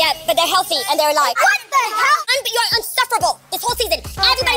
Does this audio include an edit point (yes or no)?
yes